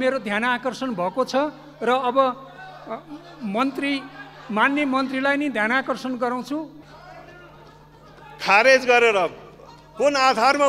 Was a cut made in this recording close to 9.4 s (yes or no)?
no